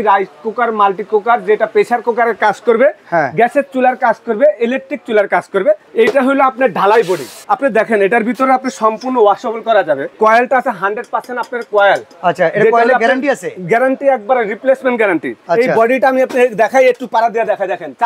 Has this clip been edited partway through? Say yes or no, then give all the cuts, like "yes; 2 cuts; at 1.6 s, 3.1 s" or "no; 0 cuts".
yes; 4 cuts; at 5.9 s, 7.3 s, 10.1 s, 15.3 s